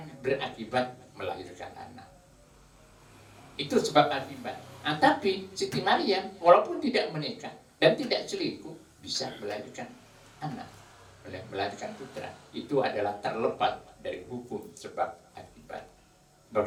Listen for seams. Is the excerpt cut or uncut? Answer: uncut